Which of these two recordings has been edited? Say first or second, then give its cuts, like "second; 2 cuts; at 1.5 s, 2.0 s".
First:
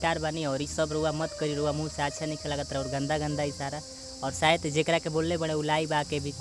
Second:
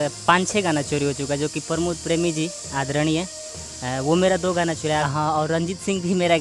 second; 1 cut; at 5.1 s